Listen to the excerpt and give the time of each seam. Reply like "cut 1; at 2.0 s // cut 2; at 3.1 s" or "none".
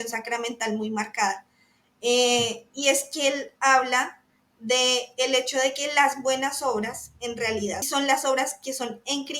cut 1; at 7.9 s